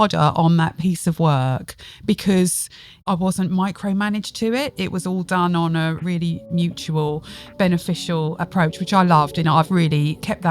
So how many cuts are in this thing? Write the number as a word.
four